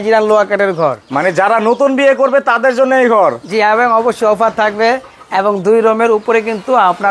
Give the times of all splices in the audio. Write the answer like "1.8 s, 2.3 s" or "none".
none